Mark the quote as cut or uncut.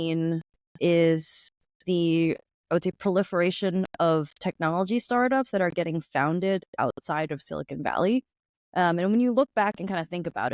uncut